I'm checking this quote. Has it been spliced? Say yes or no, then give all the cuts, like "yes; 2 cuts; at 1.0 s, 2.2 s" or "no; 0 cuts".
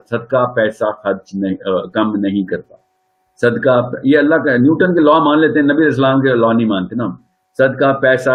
no; 0 cuts